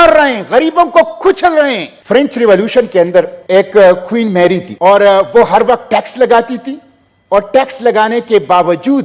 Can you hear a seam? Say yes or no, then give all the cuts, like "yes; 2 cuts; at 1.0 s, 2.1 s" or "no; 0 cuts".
yes; 3 cuts; at 1.9 s, 3.4 s, 4.7 s